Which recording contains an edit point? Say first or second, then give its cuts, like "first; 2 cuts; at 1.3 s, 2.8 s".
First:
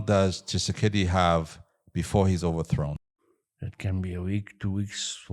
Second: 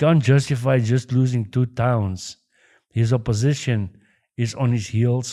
first; 1 cut; at 3.0 s